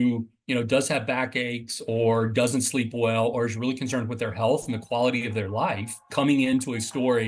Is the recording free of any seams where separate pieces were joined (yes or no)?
no